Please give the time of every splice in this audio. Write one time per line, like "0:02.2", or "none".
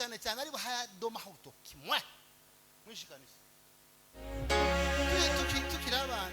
0:04.4